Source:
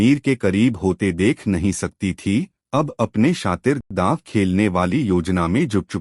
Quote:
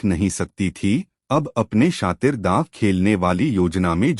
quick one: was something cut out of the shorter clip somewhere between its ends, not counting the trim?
yes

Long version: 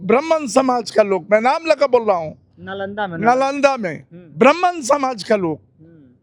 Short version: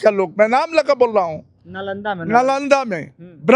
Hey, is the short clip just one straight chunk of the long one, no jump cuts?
yes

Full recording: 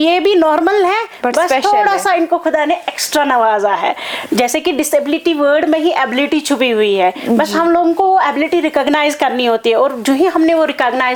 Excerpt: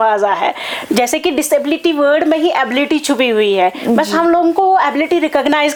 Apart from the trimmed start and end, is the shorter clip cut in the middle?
no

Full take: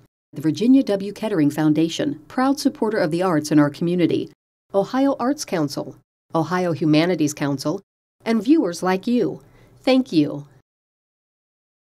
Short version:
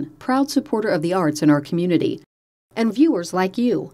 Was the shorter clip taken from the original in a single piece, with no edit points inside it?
no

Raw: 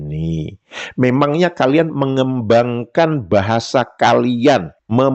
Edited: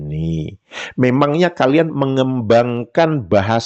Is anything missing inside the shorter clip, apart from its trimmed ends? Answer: no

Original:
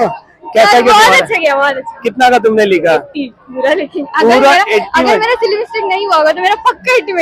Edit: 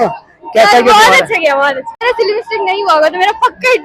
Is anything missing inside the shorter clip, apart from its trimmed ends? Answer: yes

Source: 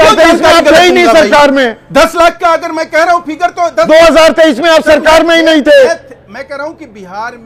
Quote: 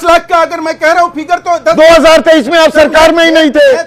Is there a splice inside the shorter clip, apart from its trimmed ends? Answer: no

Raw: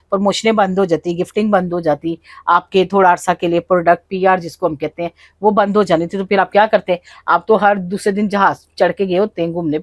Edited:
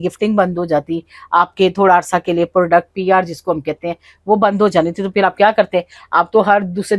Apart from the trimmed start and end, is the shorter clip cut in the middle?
no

